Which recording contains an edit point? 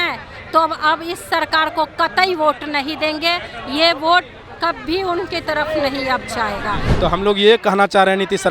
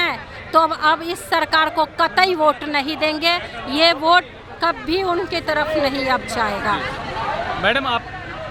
first; 1 cut; at 6.9 s

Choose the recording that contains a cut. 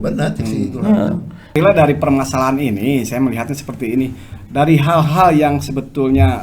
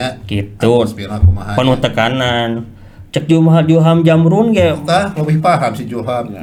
first; 1 cut; at 1.5 s

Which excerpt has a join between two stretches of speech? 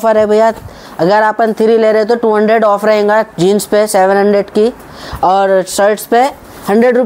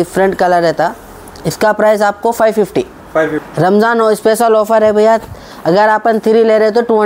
second; 1 cut; at 3.4 s

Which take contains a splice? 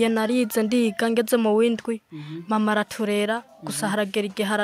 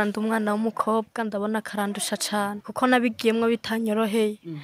second; 1 cut; at 2.6 s

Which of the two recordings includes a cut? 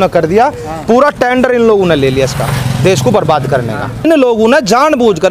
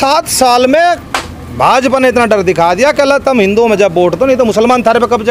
first; 1 cut; at 4.0 s

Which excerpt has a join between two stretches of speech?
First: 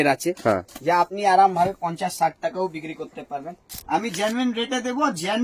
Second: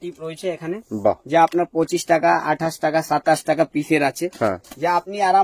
first; 1 cut; at 3.7 s

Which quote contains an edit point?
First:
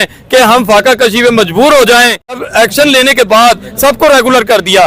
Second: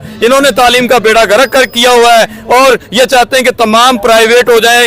first; 1 cut; at 2.4 s

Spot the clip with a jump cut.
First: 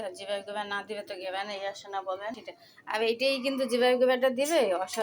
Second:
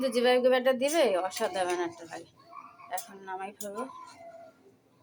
first; 1 cut; at 2.5 s

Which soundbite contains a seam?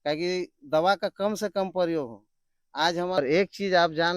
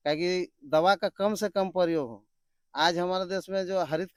first; 1 cut; at 3.2 s

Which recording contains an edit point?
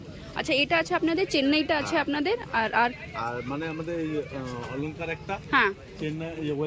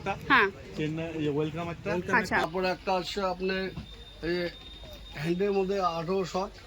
second; 1 cut; at 2.4 s

